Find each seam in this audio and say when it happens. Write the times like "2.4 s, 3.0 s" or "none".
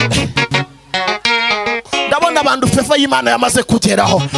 1.8 s